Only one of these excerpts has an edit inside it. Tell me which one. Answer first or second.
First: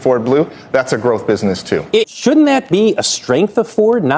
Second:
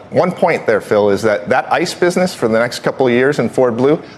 first